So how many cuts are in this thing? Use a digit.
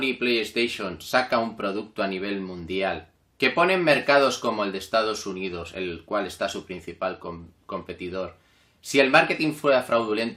0